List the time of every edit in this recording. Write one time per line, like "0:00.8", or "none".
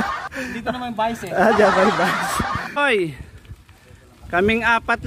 0:02.8